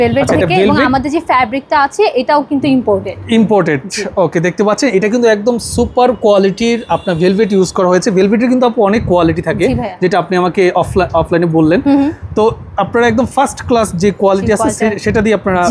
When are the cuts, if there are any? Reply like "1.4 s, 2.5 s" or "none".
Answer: none

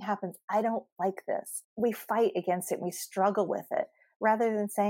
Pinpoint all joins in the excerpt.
1.6 s

